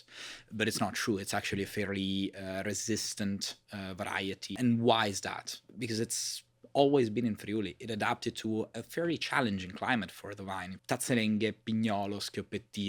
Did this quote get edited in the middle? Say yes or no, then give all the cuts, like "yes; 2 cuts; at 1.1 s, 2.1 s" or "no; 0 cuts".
yes; 3 cuts; at 4.5 s, 5.6 s, 10.7 s